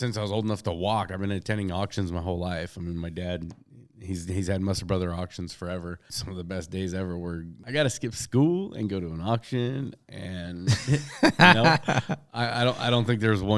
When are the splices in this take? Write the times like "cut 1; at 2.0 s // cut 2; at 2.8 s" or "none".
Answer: cut 1; at 6.2 s // cut 2; at 7.5 s

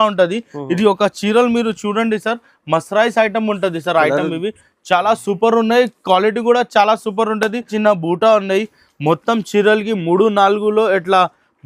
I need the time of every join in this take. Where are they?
cut 1; at 7.7 s

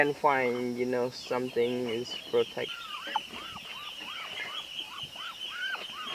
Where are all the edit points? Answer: cut 1; at 2.8 s

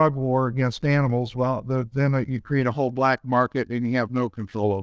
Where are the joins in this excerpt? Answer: none

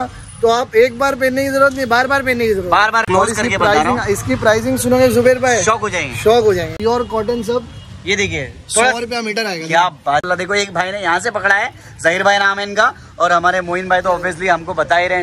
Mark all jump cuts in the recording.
cut 1; at 3.0 s // cut 2; at 6.7 s // cut 3; at 10.3 s

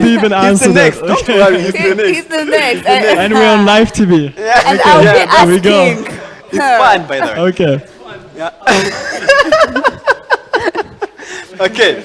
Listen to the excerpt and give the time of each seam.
none

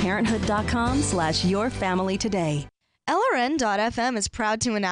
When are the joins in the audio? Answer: none

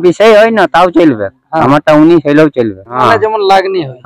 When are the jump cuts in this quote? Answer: cut 1; at 3.0 s

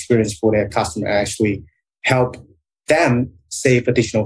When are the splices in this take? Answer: cut 1; at 1.8 s

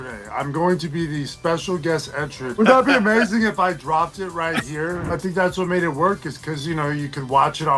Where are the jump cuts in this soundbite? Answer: cut 1; at 2.6 s // cut 2; at 5.1 s

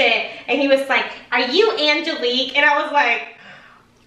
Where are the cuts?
none

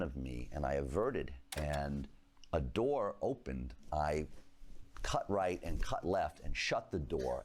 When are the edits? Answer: cut 1; at 1.4 s // cut 2; at 3.8 s

